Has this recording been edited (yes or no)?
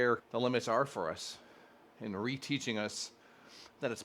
no